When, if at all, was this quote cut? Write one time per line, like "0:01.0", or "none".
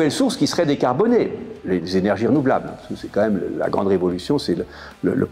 none